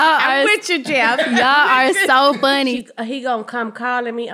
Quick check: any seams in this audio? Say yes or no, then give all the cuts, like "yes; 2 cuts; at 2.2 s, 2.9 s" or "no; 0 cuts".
yes; 1 cut; at 2.8 s